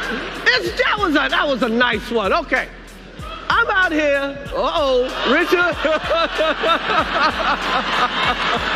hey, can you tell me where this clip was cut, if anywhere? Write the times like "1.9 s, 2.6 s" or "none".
0.9 s, 6.4 s